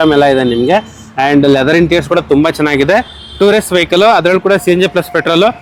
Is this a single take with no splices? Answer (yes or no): yes